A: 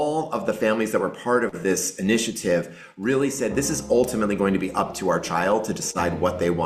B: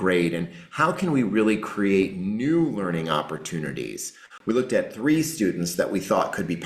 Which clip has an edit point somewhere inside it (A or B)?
B